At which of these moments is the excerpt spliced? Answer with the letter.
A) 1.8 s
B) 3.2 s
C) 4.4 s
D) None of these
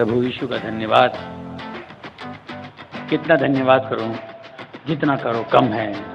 D